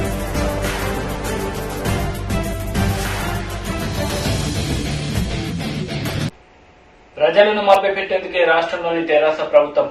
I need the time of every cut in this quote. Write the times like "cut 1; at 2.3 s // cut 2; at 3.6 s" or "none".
cut 1; at 6.4 s